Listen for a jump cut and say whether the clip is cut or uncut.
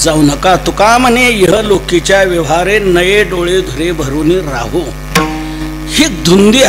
uncut